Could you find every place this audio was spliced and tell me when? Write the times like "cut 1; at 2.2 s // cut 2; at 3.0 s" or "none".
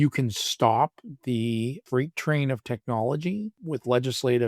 cut 1; at 1.8 s // cut 2; at 3.6 s

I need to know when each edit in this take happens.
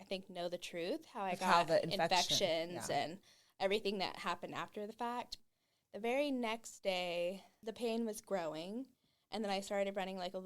cut 1; at 5.3 s // cut 2; at 7.5 s

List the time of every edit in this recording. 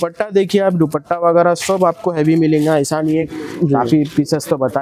cut 1; at 3.2 s

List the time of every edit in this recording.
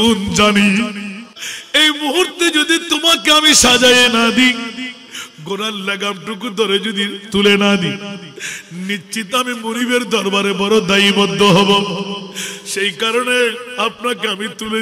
cut 1; at 1.2 s

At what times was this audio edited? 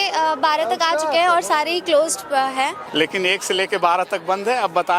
cut 1; at 2.8 s

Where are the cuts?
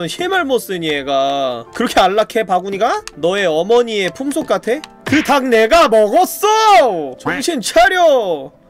none

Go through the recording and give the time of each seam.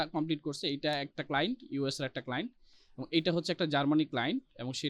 none

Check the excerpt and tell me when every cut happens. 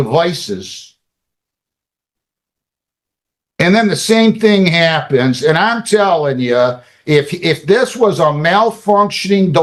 none

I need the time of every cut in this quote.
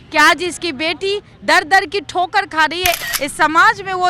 cut 1; at 3.0 s

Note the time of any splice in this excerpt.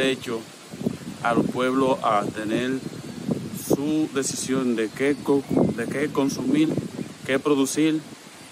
none

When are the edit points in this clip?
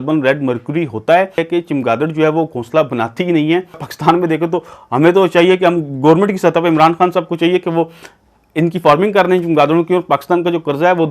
cut 1; at 1.4 s // cut 2; at 3.9 s

